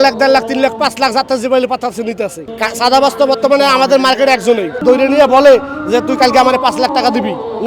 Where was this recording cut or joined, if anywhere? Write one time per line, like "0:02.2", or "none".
0:02.4
0:04.8